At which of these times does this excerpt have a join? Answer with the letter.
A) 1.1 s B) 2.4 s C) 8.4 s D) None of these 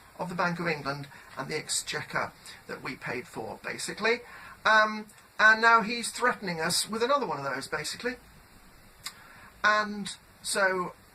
B